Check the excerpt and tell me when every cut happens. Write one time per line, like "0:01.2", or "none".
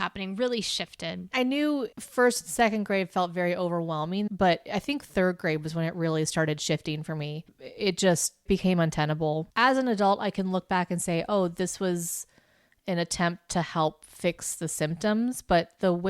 0:01.3
0:04.3
0:09.5